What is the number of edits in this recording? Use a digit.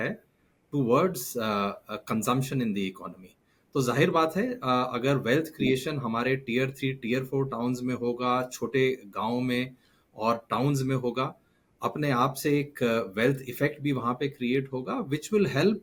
0